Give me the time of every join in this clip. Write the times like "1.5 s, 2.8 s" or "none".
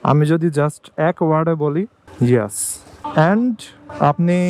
3.0 s